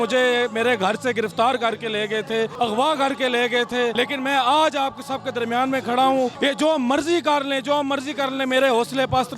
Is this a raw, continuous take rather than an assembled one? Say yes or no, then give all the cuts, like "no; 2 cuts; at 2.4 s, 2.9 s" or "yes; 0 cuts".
no; 3 cuts; at 2.5 s, 3.9 s, 6.3 s